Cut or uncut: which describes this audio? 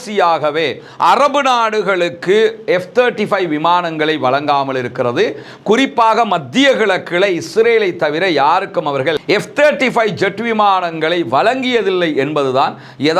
uncut